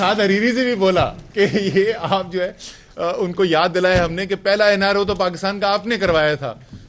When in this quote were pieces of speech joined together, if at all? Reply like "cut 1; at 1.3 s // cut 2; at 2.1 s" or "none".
none